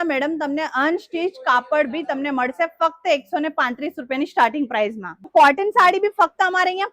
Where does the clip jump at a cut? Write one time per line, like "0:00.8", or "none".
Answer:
0:05.3